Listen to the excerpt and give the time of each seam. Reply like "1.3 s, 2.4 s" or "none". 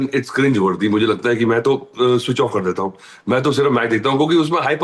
none